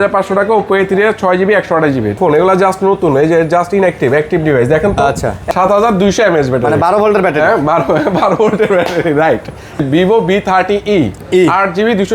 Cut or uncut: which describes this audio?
cut